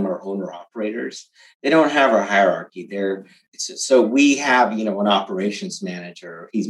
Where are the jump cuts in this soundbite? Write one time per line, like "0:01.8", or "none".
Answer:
none